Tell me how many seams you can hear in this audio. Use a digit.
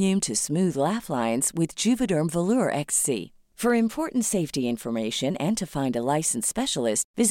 0